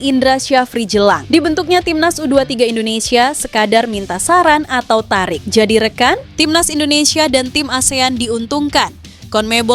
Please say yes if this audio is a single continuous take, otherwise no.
no